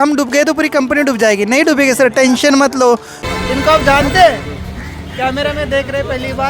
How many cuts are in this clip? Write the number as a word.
one